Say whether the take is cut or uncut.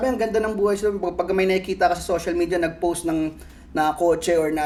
uncut